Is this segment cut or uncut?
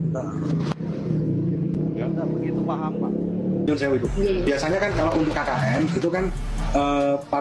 cut